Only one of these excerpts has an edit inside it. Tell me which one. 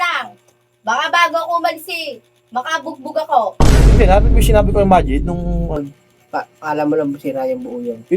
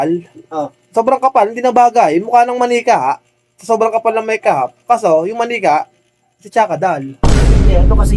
first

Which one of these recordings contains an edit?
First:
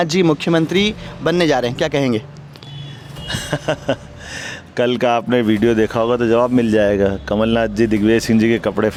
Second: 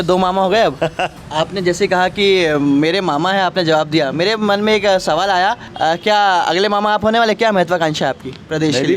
second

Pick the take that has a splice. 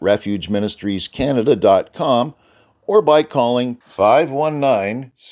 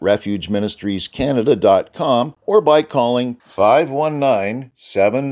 second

